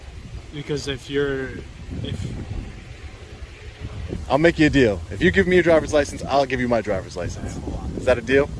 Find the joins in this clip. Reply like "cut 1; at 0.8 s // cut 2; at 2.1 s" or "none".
cut 1; at 4.1 s